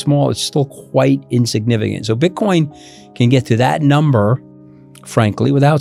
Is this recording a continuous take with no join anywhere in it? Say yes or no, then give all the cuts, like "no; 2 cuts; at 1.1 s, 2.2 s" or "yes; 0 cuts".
yes; 0 cuts